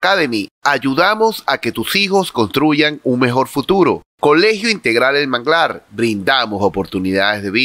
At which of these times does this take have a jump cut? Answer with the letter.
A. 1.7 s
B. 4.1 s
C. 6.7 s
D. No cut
B